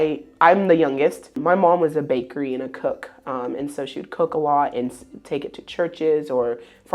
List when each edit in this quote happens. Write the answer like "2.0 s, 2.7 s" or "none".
1.4 s

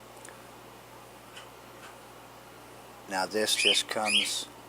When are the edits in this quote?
2.6 s

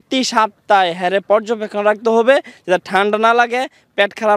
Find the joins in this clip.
none

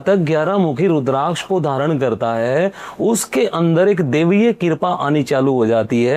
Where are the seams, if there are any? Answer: none

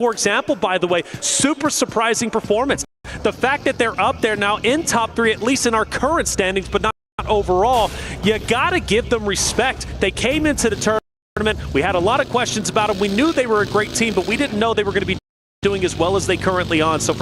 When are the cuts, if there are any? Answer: none

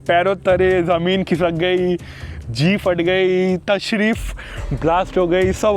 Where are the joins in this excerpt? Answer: none

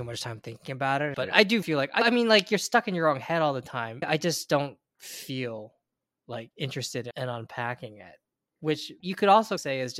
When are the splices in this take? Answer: 3.9 s, 7.1 s, 9.0 s

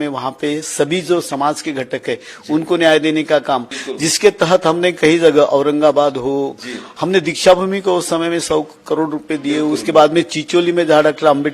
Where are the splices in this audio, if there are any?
3.8 s

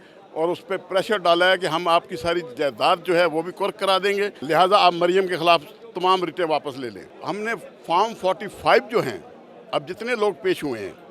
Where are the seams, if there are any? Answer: 4.4 s, 7.1 s

